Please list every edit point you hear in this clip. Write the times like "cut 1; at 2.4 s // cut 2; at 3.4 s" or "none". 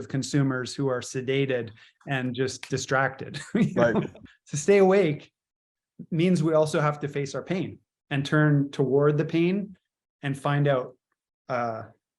cut 1; at 4.2 s